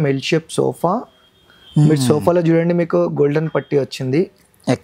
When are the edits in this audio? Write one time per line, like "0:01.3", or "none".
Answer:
none